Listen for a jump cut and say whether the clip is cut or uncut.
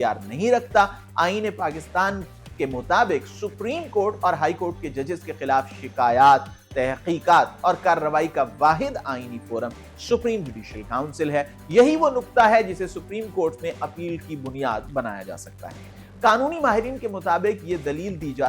uncut